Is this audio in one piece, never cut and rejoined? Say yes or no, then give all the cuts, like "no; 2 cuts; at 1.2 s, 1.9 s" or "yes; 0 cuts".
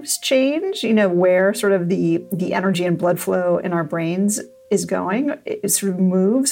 no; 1 cut; at 4.6 s